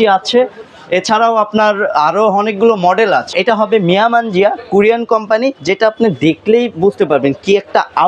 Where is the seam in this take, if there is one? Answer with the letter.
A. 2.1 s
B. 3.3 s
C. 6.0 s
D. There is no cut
B